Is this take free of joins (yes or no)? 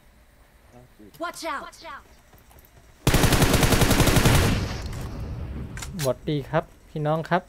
no